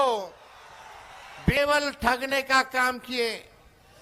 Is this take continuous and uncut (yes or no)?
no